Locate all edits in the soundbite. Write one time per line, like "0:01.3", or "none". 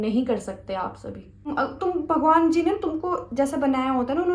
0:01.5